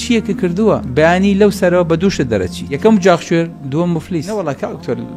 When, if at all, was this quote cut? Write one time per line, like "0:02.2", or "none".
0:00.9
0:02.7
0:04.3